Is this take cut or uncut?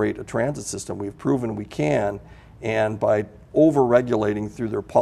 uncut